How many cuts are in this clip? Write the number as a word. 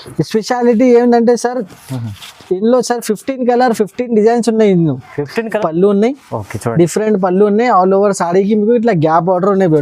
one